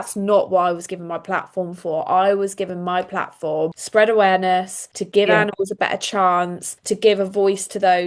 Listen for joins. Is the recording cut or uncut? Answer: uncut